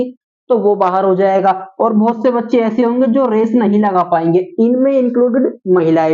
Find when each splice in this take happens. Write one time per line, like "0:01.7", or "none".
none